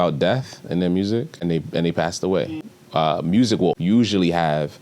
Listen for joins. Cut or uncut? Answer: cut